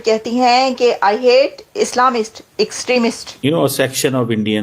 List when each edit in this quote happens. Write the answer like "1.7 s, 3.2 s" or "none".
3.3 s